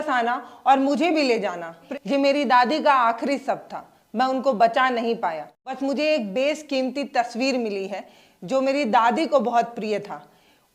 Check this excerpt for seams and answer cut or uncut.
cut